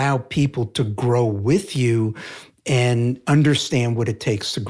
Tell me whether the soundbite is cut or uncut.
cut